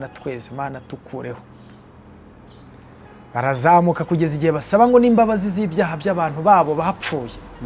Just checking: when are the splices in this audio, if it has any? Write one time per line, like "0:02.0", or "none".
none